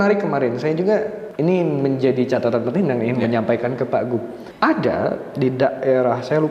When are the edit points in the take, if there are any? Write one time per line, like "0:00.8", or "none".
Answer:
0:01.2
0:04.4